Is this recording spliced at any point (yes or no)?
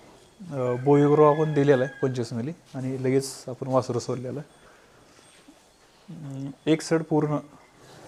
no